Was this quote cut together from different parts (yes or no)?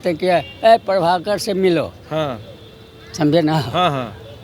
no